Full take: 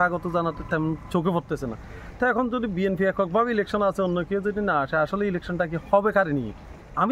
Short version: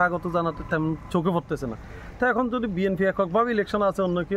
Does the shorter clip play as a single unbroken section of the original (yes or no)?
yes